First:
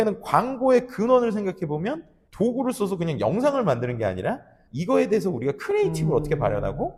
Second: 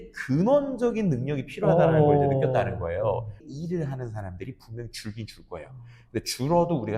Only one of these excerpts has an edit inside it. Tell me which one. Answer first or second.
second